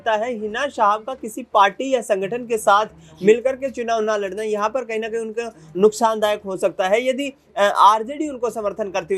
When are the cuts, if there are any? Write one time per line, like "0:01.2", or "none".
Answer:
none